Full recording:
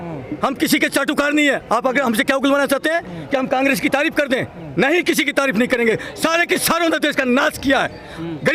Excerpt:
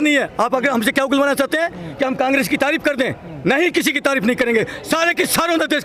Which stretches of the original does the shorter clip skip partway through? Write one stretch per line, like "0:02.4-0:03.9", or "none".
none